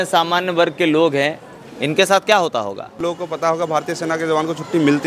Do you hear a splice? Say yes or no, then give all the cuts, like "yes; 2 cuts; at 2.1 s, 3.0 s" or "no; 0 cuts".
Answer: yes; 1 cut; at 3.0 s